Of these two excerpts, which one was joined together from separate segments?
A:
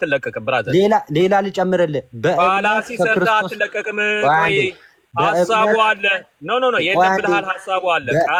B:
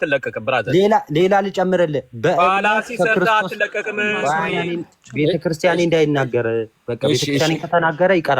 B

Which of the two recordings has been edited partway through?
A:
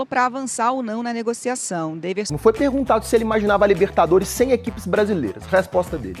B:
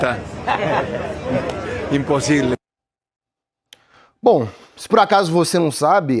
A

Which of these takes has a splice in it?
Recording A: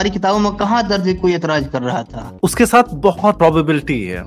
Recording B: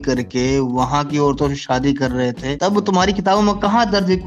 A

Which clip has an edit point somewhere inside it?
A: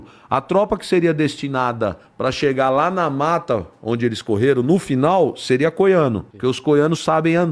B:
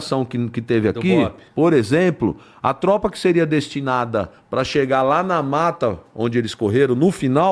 A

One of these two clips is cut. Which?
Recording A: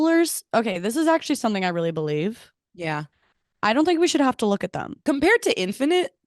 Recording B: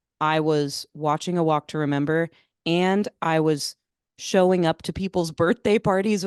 A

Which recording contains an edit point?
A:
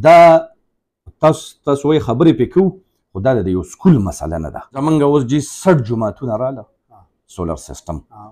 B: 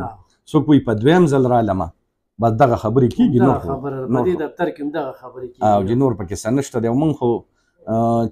A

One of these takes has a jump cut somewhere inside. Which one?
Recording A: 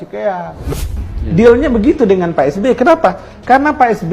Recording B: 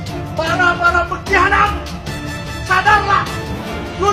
A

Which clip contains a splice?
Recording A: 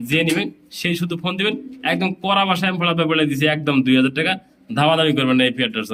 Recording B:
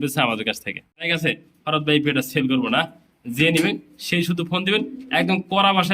B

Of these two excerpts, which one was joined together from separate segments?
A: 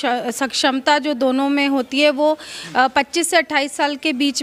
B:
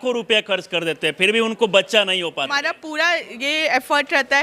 B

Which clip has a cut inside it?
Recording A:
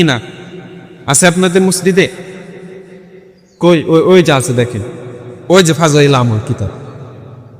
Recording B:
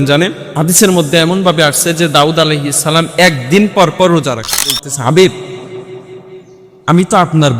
B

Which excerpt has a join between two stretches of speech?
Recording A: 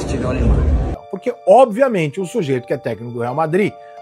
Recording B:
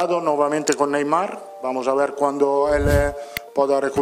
A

